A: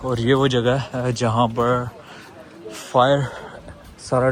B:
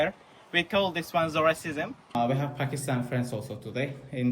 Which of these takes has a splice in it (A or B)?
B